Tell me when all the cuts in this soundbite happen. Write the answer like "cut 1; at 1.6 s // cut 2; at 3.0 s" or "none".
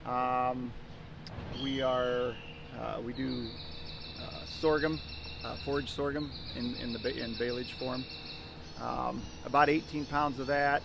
none